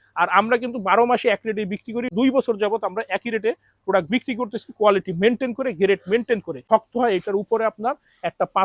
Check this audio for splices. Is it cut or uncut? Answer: cut